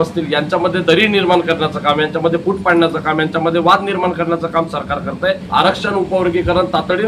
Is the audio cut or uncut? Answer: cut